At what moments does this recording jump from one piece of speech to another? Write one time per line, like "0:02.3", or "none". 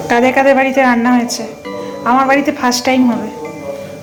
none

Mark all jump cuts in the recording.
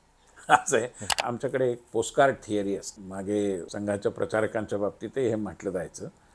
0:01.2
0:03.0
0:03.7

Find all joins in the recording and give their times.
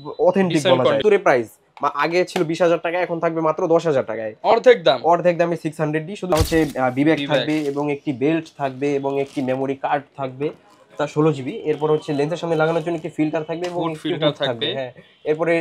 0:01.0
0:06.3

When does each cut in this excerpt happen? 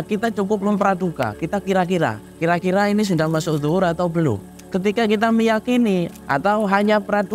0:04.5
0:06.2

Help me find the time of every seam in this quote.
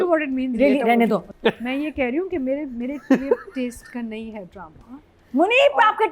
none

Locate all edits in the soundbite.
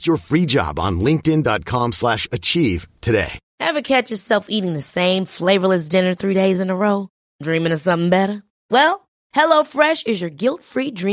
0:03.4

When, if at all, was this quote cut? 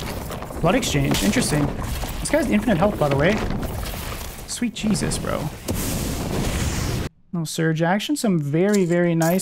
0:07.1

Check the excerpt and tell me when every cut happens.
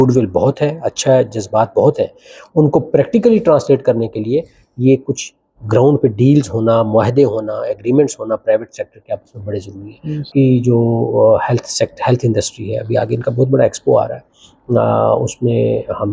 0:10.3

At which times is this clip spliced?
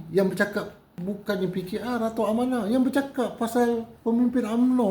0:01.0

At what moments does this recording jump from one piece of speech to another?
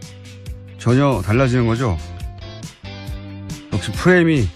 0:02.0

